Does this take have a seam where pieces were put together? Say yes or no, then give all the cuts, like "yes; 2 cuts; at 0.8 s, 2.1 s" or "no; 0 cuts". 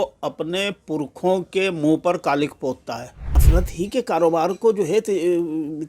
yes; 1 cut; at 3.4 s